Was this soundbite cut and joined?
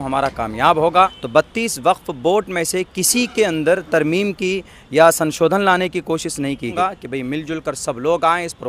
yes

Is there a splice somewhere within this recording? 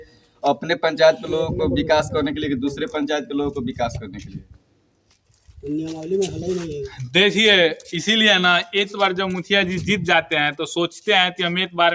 no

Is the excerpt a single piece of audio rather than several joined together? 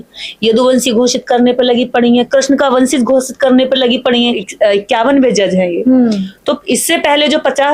no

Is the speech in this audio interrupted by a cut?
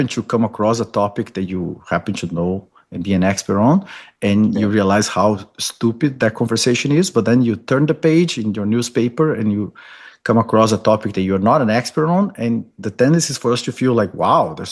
no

